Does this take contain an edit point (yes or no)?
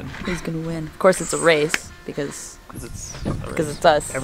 no